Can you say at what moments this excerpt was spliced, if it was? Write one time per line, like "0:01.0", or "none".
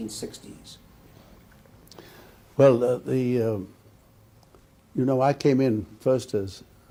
none